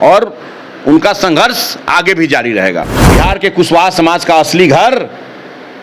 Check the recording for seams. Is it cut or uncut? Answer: cut